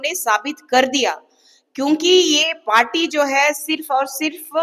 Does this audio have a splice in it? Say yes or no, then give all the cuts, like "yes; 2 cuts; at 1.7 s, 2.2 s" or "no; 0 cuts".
no; 0 cuts